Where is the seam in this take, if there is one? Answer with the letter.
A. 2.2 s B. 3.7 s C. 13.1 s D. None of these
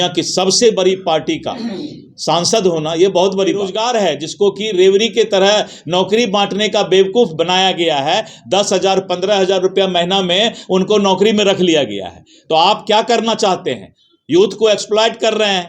B